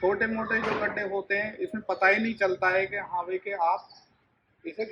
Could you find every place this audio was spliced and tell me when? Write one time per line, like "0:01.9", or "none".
none